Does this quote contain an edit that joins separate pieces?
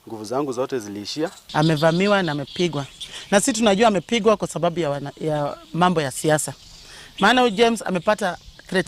yes; 1 cut; at 1.4 s

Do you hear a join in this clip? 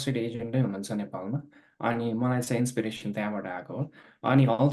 no; 0 cuts

